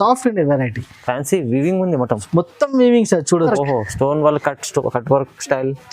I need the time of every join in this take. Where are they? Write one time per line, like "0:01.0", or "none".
0:03.5